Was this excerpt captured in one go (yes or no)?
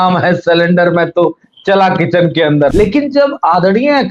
no